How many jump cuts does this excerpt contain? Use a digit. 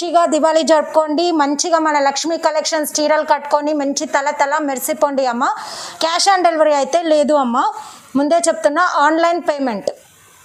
0